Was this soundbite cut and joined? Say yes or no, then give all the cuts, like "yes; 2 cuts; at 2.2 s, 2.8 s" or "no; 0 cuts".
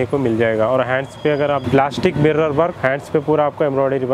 yes; 2 cuts; at 1.6 s, 2.8 s